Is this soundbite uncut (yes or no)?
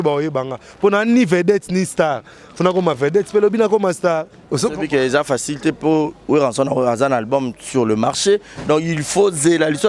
yes